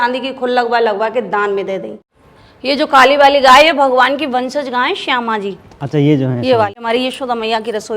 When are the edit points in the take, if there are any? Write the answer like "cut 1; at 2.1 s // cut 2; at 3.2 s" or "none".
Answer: cut 1; at 2.0 s // cut 2; at 6.8 s